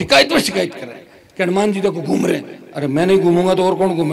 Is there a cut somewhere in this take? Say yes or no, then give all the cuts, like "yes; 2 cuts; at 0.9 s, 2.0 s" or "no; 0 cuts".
no; 0 cuts